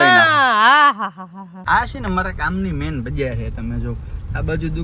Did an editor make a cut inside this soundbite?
yes; 1 cut; at 1.6 s

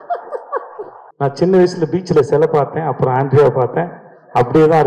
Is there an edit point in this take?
yes; 1 cut; at 1.0 s

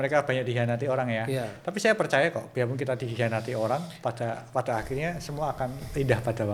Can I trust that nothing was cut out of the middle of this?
yes; 0 cuts

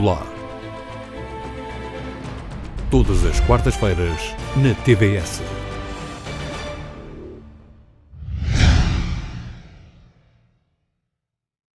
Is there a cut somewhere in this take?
no; 0 cuts

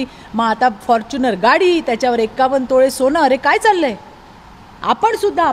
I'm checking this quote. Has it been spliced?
no; 0 cuts

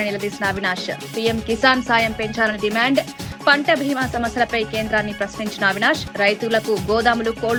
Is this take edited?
no; 0 cuts

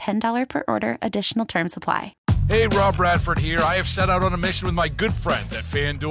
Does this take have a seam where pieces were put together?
yes; 1 cut; at 2.1 s

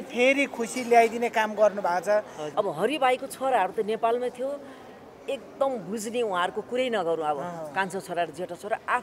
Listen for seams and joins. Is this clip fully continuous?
no; 1 cut; at 2.4 s

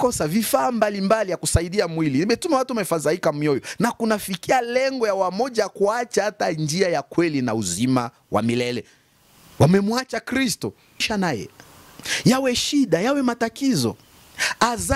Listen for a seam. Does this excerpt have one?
yes; 1 cut; at 11.1 s

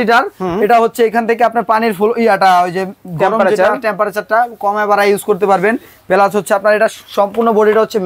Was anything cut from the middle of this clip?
no; 0 cuts

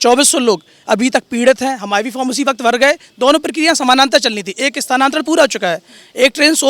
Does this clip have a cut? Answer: no; 0 cuts

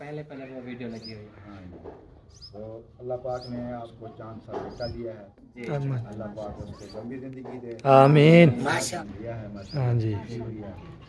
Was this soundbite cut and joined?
yes; 2 cuts; at 3.9 s, 8.9 s

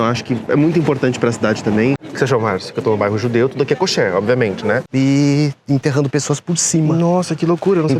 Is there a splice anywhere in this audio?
yes; 2 cuts; at 2.0 s, 4.9 s

